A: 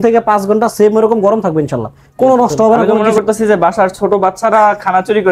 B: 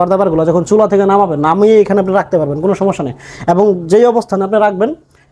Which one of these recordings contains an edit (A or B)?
A